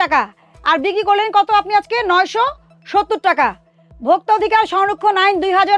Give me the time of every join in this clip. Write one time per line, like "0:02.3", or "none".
none